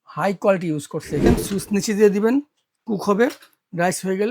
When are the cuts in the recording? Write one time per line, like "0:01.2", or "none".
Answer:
0:01.2